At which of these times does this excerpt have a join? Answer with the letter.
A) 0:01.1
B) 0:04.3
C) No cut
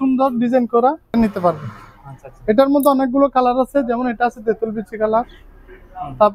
A